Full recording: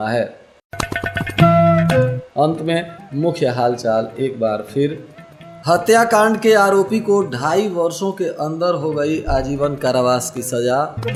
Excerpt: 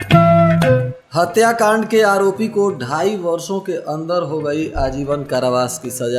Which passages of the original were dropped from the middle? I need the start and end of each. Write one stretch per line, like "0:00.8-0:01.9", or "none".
0:02.2-0:05.5

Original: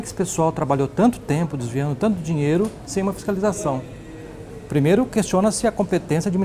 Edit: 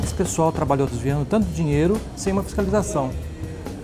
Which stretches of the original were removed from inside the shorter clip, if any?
0:00.9-0:01.6

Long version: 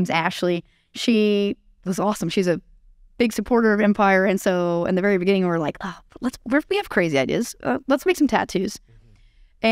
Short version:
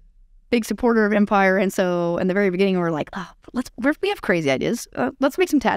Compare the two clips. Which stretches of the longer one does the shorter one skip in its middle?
none

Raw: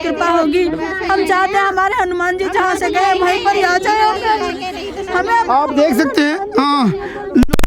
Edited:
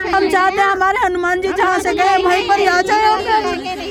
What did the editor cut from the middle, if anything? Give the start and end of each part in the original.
none

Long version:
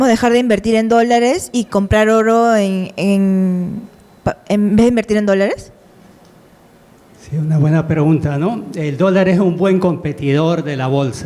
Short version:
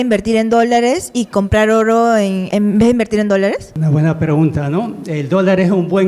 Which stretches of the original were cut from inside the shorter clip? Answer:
0:02.8-0:04.4
0:05.7-0:07.4

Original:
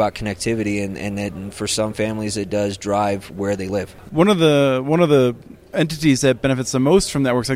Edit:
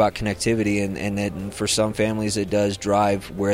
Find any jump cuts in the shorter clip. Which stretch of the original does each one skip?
none

